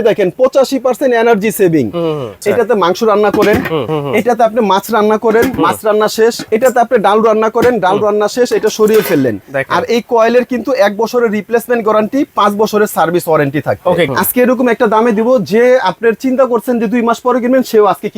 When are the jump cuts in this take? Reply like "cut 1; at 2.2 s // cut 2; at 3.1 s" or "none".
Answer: cut 1; at 2.3 s // cut 2; at 3.9 s // cut 3; at 6.4 s // cut 4; at 9.4 s // cut 5; at 14.1 s